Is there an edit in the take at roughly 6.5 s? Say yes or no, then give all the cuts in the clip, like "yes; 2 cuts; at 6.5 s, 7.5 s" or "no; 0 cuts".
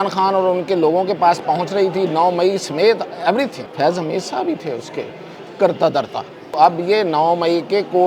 yes; 2 cuts; at 3.6 s, 6.5 s